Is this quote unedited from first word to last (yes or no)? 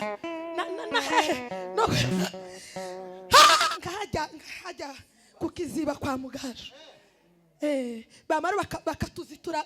no